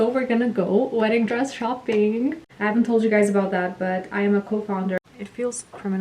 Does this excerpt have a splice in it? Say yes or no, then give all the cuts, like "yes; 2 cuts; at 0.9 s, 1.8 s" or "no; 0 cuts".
yes; 2 cuts; at 2.5 s, 5.0 s